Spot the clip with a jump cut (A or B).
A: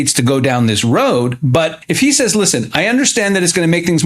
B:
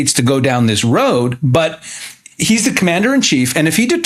A